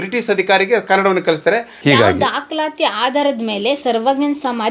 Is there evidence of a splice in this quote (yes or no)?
yes